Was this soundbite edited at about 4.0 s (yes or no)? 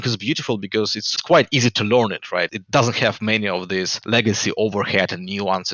yes